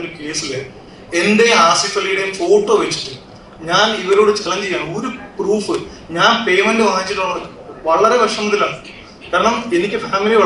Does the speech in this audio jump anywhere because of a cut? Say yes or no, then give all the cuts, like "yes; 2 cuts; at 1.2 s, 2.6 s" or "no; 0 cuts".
no; 0 cuts